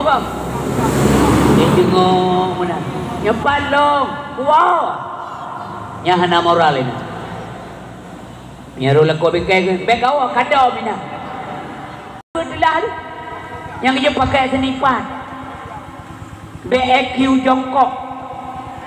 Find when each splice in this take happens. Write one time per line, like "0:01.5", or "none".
0:12.3